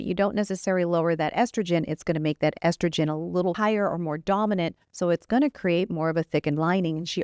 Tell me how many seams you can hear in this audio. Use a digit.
1